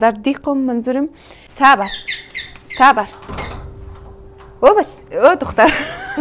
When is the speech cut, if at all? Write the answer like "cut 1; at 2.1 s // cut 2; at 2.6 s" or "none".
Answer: cut 1; at 1.4 s